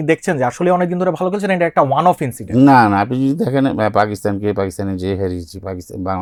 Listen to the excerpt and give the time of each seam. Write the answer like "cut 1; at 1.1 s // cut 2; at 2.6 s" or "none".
none